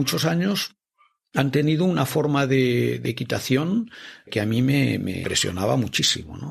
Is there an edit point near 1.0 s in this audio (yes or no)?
no